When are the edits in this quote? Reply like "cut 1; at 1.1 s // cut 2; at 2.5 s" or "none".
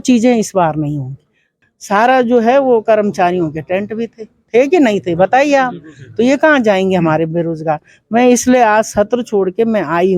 cut 1; at 1.5 s